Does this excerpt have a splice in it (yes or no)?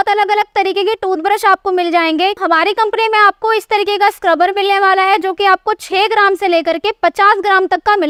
no